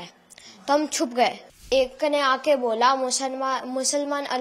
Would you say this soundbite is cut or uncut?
cut